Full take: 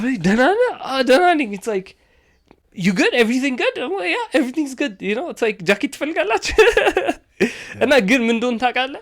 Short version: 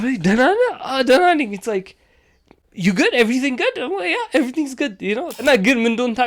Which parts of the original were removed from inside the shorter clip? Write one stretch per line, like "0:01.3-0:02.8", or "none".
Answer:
0:05.4-0:07.8